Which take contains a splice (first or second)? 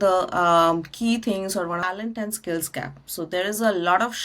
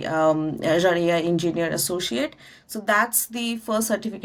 first